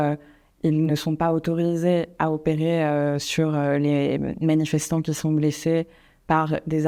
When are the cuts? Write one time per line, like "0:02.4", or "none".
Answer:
none